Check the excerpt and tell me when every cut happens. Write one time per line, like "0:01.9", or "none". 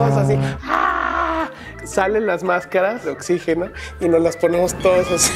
0:03.1